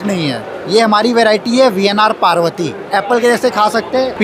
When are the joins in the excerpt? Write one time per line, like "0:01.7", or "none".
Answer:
0:02.8